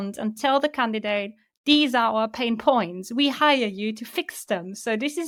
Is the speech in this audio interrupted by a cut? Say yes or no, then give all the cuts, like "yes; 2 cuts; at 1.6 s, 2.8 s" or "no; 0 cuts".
no; 0 cuts